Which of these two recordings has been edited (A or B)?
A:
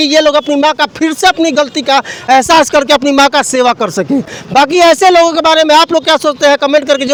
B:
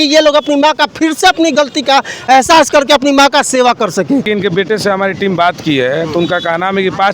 B